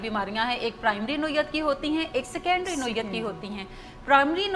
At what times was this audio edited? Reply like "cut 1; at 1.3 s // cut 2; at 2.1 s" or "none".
none